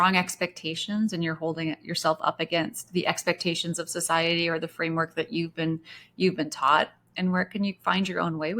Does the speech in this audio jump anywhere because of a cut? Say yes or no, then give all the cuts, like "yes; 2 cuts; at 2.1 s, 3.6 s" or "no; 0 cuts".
no; 0 cuts